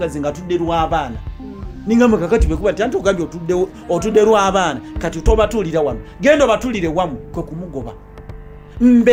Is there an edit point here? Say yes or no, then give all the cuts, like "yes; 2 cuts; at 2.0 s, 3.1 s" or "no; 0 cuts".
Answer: no; 0 cuts